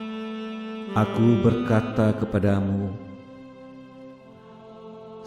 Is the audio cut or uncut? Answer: cut